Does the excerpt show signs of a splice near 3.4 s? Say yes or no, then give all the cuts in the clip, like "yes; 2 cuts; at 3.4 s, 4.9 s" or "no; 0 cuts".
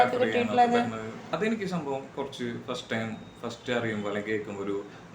no; 1 cut; at 1.2 s